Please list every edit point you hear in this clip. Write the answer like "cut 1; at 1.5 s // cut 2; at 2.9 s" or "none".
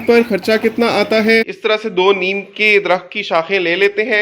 cut 1; at 1.5 s